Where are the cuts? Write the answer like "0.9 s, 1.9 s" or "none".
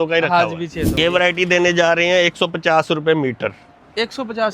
0.9 s